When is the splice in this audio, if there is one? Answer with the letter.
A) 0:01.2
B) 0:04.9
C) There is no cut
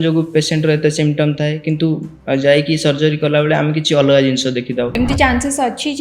B